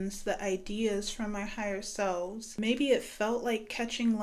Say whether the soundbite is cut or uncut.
cut